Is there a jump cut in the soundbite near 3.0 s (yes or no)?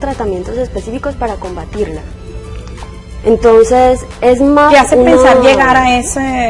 yes